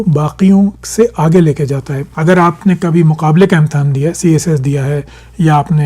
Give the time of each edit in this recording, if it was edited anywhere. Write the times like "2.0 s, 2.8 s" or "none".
none